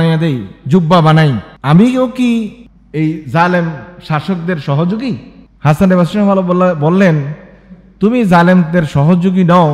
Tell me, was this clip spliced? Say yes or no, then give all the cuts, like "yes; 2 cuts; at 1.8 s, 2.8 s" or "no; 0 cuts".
no; 0 cuts